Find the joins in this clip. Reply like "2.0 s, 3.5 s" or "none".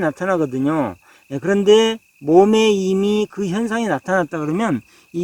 none

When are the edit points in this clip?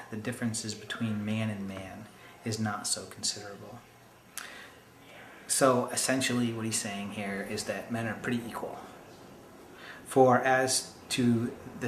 8.2 s

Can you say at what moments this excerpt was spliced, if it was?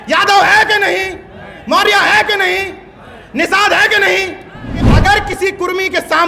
4.9 s

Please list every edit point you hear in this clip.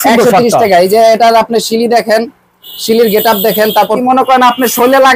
4.0 s

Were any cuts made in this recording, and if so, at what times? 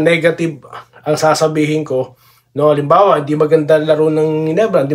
none

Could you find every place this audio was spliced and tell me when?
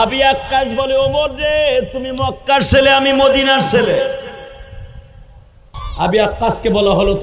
5.8 s

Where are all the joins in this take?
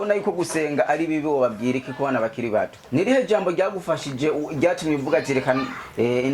2.8 s

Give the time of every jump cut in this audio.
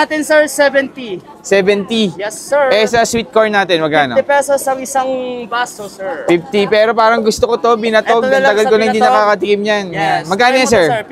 none

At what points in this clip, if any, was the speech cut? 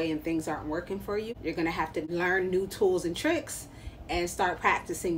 1.3 s, 2.1 s

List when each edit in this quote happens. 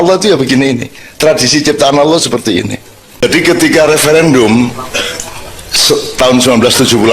3.2 s

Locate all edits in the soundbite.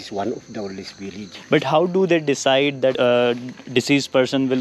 1.2 s, 3.0 s

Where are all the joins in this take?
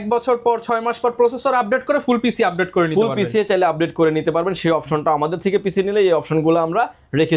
none

